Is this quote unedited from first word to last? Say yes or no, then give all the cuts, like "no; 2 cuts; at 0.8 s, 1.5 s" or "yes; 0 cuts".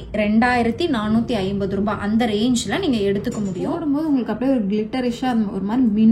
no; 1 cut; at 3.8 s